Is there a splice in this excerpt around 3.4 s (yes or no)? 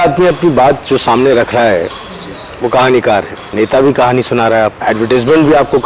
yes